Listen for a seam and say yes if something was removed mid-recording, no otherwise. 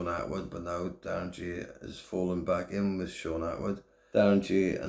yes